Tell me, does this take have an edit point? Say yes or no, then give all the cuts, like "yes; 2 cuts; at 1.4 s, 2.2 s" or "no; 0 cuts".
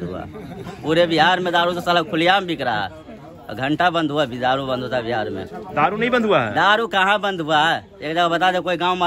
no; 0 cuts